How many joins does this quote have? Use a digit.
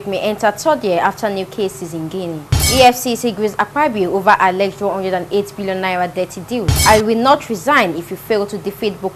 2